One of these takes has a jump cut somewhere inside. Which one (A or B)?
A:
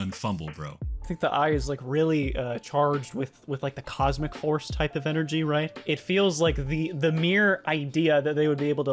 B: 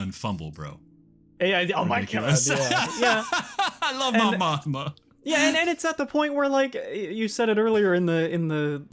A